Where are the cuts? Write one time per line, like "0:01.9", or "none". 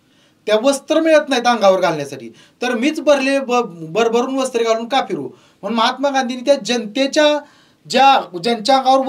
none